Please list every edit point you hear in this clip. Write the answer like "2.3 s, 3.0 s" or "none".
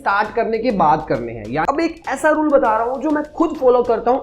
1.6 s

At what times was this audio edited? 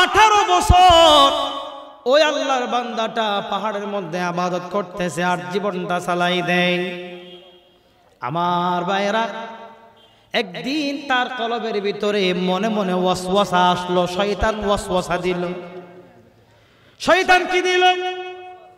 none

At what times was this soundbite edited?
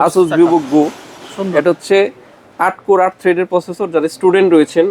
none

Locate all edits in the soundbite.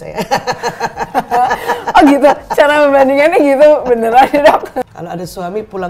4.9 s

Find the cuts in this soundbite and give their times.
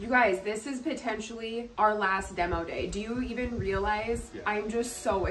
1.7 s, 4.3 s

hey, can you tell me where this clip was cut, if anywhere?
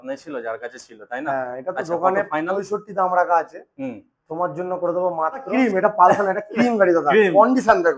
5.5 s

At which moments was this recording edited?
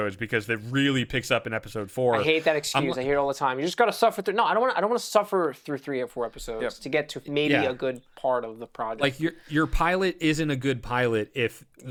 none

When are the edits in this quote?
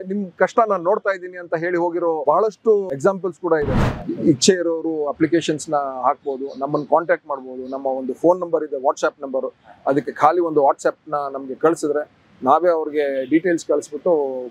2.2 s, 3.8 s

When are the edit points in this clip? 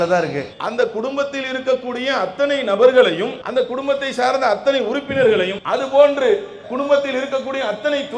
3.4 s, 5.6 s

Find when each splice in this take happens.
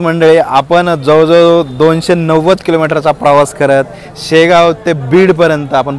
none

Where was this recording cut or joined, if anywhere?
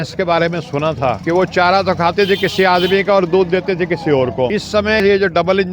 1.2 s, 5.0 s

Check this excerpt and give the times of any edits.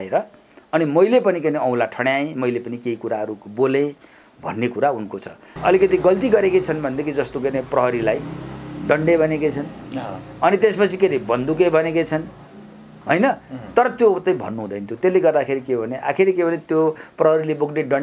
5.4 s

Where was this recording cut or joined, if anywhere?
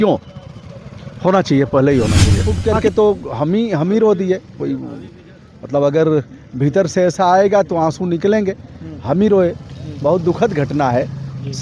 2.5 s

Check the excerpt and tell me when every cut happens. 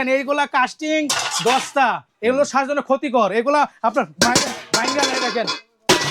none

